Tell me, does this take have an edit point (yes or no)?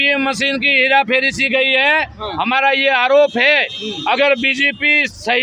no